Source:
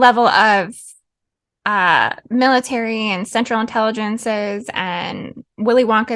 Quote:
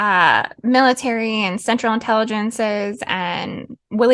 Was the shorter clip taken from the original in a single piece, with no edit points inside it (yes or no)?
yes